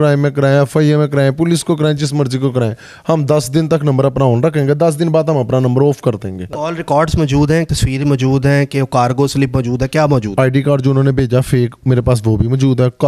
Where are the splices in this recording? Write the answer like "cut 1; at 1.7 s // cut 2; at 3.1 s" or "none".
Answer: cut 1; at 6.6 s // cut 2; at 7.7 s // cut 3; at 10.3 s